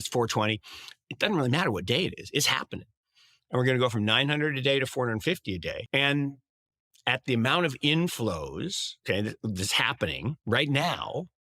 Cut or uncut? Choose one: cut